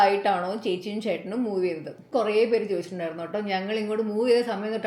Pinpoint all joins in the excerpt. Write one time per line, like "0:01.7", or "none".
0:02.0